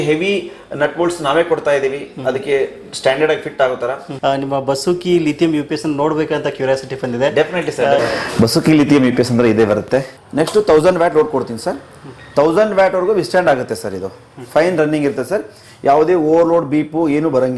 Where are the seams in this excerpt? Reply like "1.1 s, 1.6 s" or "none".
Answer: 4.1 s, 8.0 s, 10.2 s